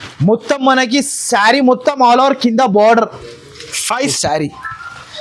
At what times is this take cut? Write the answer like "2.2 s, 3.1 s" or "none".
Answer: 4.2 s